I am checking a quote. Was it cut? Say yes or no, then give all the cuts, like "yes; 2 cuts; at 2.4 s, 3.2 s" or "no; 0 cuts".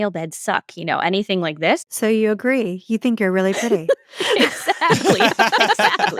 yes; 1 cut; at 2.1 s